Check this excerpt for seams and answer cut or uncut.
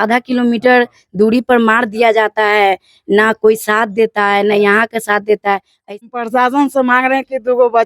cut